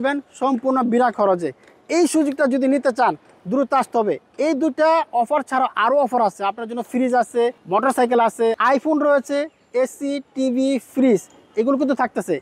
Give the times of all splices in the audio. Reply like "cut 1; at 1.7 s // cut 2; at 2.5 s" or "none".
none